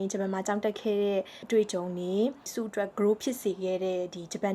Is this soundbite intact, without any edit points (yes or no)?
no